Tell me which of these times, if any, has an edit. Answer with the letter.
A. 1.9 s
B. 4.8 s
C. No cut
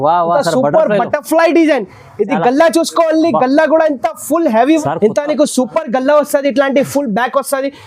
B